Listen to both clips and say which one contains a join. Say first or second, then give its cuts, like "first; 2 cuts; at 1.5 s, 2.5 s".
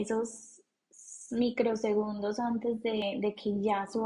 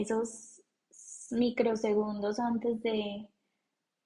first; 1 cut; at 3.0 s